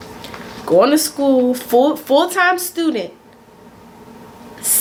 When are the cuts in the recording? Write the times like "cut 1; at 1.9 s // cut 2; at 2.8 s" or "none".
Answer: none